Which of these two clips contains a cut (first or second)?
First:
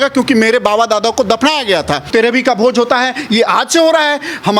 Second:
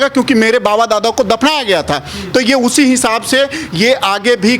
first